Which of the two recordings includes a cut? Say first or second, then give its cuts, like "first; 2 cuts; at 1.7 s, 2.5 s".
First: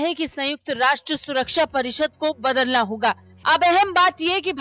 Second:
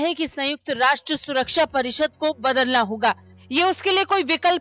first; 1 cut; at 3.3 s